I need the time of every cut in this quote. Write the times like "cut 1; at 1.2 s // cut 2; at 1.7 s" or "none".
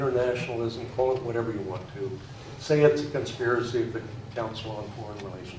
none